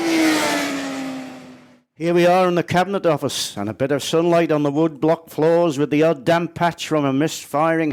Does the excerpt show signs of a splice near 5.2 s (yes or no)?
no